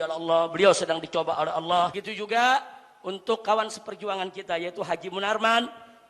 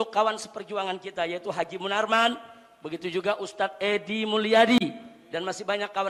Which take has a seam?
first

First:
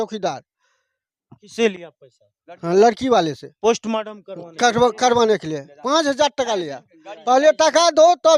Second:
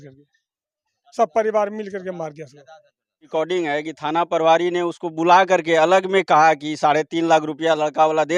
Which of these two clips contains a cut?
second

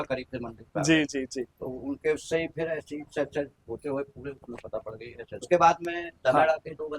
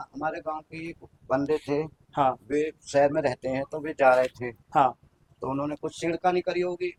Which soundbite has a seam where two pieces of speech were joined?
first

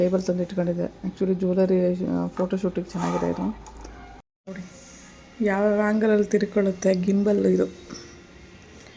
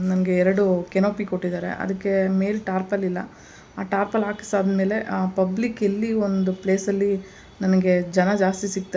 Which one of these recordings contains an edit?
first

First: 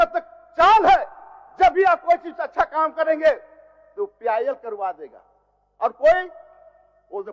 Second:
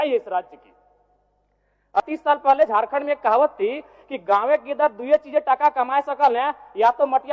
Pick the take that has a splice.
second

